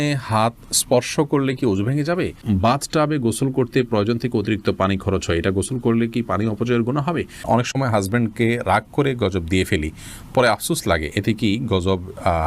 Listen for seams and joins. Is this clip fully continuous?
no; 2 cuts; at 2.4 s, 7.4 s

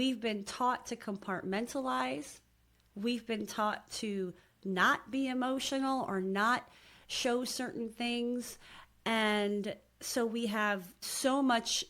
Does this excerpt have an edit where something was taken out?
yes; 2 cuts; at 2.8 s, 11.0 s

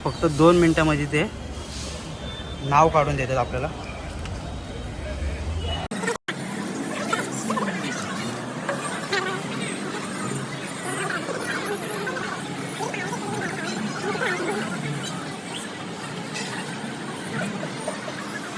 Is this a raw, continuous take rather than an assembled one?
yes; 0 cuts

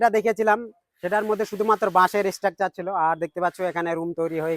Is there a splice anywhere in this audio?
no; 0 cuts

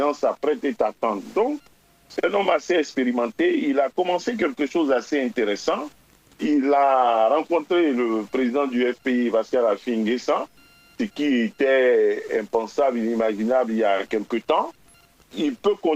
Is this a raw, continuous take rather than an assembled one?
yes; 0 cuts

